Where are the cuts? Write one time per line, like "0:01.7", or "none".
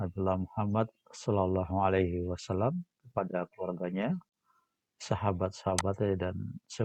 none